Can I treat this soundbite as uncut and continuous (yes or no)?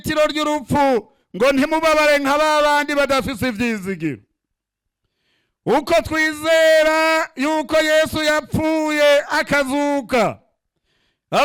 yes